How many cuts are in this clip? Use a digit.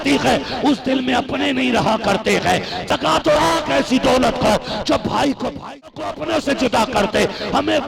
2